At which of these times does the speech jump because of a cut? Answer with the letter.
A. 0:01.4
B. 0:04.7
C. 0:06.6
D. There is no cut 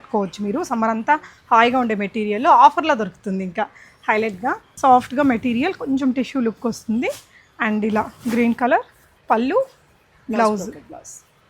B